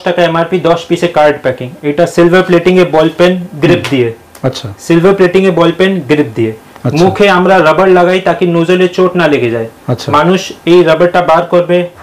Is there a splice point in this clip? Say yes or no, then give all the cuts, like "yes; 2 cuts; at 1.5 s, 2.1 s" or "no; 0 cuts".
no; 0 cuts